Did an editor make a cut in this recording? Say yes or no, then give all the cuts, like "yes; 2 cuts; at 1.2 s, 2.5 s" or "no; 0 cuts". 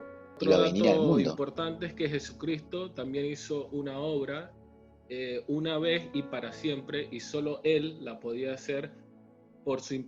yes; 1 cut; at 1.3 s